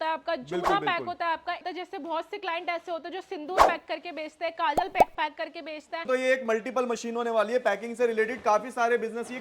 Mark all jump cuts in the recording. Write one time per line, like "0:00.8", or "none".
0:01.6
0:06.0